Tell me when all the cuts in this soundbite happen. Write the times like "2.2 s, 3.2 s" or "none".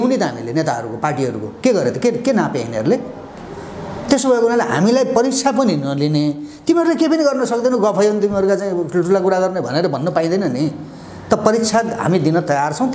none